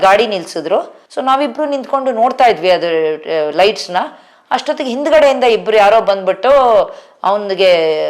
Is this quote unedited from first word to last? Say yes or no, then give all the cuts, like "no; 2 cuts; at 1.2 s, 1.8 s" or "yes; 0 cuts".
yes; 0 cuts